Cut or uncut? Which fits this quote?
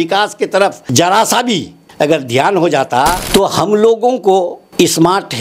cut